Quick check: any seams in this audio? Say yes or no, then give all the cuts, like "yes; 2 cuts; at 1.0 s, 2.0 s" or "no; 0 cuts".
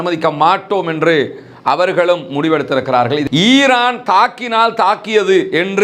yes; 1 cut; at 3.2 s